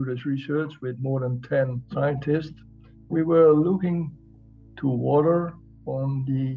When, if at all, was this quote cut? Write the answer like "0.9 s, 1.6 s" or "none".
1.8 s, 3.1 s

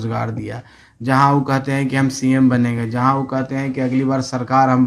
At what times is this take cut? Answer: none

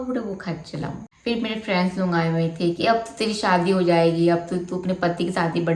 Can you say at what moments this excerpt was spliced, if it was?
1.1 s

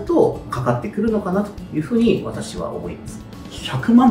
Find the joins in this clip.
none

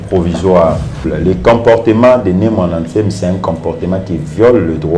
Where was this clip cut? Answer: 1.1 s

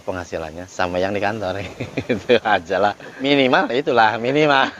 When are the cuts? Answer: 3.1 s

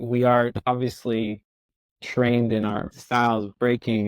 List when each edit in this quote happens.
2.9 s

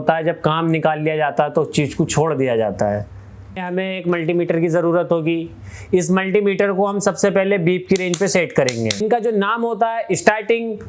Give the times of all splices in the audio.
3.6 s, 9.0 s

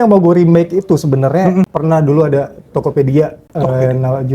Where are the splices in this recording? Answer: 1.7 s, 3.4 s

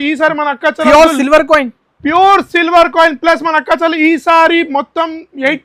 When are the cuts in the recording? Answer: none

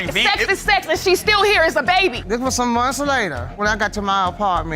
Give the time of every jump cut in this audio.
2.2 s

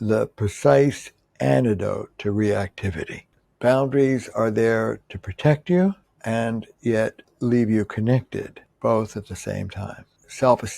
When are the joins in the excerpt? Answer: 3.3 s

